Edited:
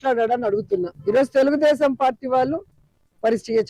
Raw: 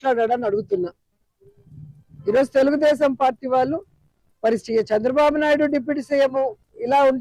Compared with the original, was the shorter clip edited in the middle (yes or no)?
yes